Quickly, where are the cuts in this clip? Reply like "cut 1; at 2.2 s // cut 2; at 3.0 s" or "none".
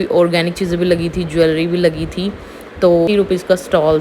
cut 1; at 3.1 s

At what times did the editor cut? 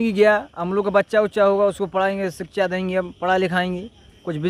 none

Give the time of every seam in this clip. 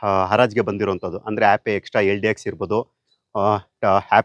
none

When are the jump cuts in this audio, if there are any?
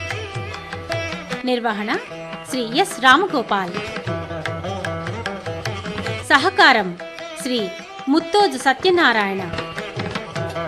cut 1; at 1.2 s // cut 2; at 4.3 s // cut 3; at 6.2 s // cut 4; at 9.5 s

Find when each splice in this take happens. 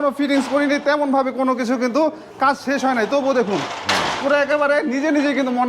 none

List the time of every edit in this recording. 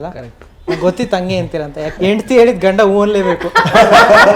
cut 1; at 1.9 s

